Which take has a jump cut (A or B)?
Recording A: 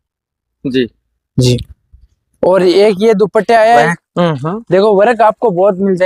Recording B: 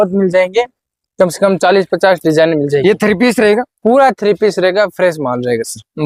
A